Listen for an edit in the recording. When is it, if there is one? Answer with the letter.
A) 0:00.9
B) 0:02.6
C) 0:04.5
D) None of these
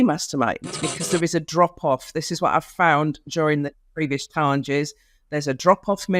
A